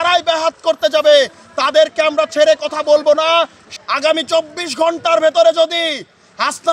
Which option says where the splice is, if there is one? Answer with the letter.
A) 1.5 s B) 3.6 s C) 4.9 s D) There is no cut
B